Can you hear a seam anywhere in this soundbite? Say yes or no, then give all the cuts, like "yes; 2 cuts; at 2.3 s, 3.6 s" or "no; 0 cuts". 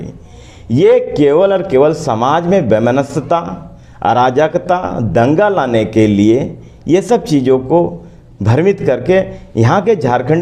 no; 0 cuts